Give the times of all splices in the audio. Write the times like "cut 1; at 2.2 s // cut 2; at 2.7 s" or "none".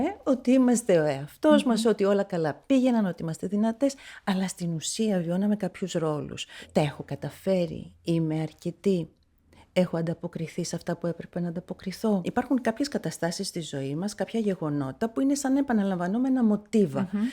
cut 1; at 6.6 s // cut 2; at 12.3 s

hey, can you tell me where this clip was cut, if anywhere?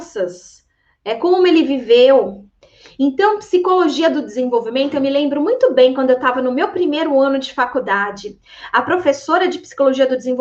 none

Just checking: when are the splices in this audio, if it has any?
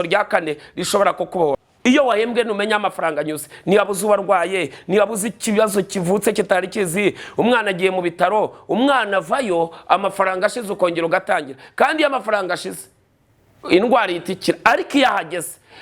cut 1; at 1.7 s

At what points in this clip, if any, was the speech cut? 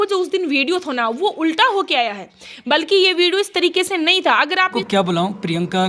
cut 1; at 4.8 s

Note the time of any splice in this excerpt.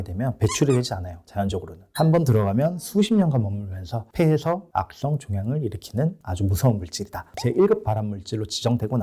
cut 1; at 7.2 s

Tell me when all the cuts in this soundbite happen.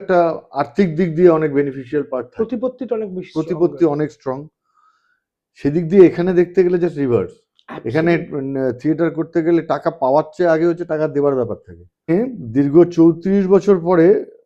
cut 1; at 12.1 s

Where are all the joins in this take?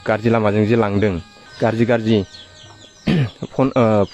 cut 1; at 1.4 s

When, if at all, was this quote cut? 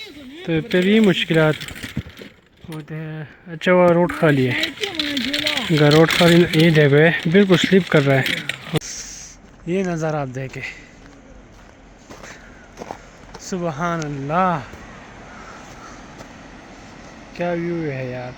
cut 1; at 8.8 s

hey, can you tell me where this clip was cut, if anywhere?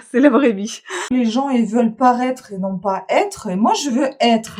cut 1; at 1.1 s

